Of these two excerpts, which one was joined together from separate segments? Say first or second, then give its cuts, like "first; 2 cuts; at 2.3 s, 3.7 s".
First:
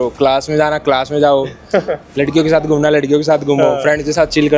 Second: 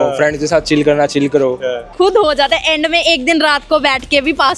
second; 1 cut; at 1.9 s